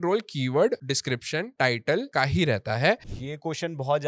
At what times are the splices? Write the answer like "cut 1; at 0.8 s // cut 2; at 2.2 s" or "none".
cut 1; at 1.2 s // cut 2; at 2.1 s // cut 3; at 3.1 s